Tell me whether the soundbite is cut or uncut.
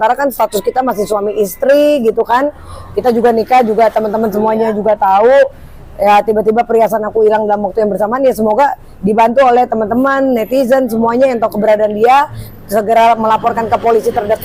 uncut